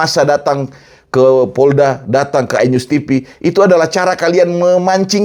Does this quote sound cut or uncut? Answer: uncut